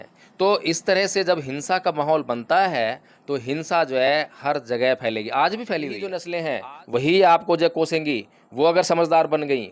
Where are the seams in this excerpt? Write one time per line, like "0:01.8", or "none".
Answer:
0:06.3